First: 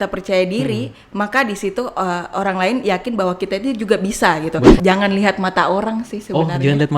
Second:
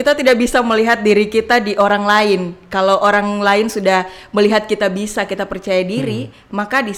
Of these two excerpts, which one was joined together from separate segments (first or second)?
first